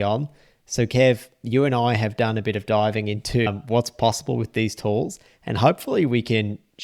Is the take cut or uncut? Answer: uncut